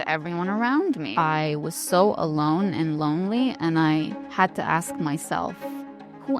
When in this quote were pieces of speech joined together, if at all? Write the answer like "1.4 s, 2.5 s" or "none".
1.1 s